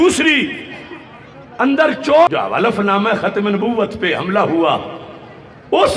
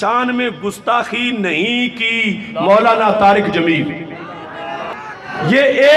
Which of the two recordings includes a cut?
first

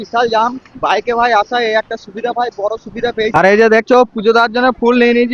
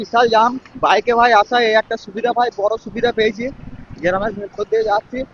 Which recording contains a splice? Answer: first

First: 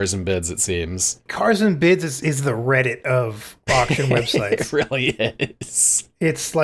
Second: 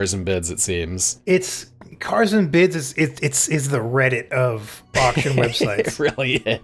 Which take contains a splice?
first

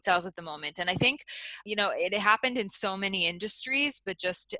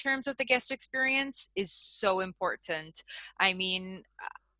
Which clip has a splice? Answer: first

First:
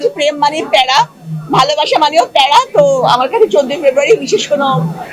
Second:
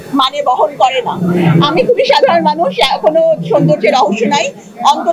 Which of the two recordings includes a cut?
second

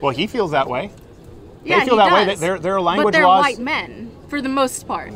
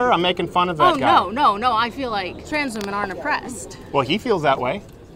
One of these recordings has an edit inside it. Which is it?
second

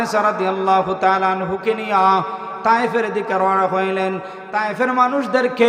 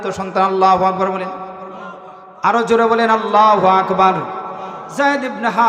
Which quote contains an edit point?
second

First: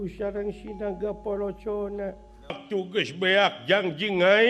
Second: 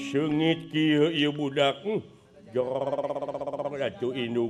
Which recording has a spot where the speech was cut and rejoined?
first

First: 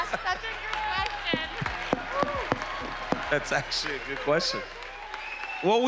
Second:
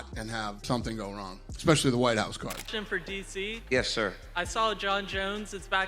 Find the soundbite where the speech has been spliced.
second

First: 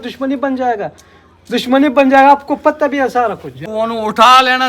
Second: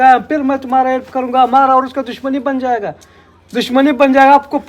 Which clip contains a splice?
first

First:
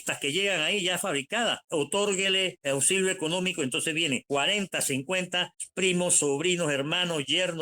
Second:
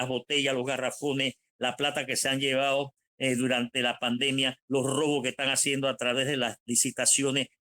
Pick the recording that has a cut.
first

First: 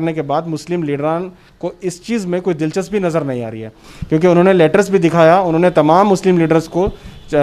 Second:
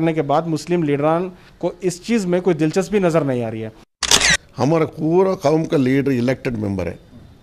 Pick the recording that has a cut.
second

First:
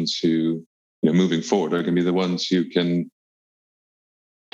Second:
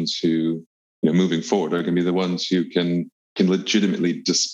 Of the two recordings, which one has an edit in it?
second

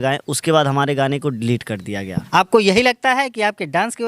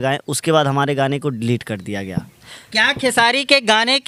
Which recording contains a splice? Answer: first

